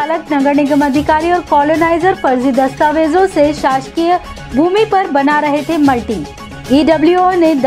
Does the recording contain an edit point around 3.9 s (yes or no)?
no